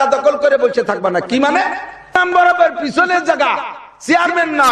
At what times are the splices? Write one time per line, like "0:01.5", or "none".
0:02.1